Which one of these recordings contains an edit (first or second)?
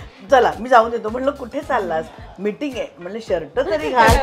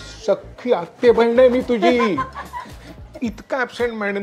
second